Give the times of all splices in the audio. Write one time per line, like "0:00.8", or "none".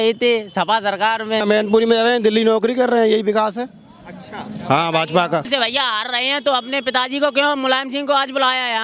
0:01.4
0:05.5